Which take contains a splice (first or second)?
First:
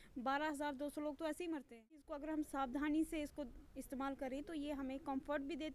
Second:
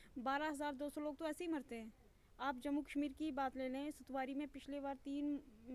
first